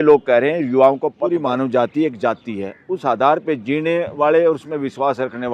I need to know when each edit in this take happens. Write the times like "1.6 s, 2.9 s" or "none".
1.2 s